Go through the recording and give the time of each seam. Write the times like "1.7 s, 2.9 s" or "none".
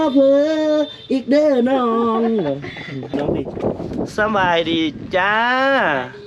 3.1 s